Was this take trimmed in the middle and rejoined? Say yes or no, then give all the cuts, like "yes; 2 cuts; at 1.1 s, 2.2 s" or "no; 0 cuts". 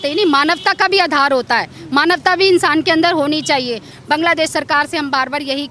yes; 1 cut; at 3.9 s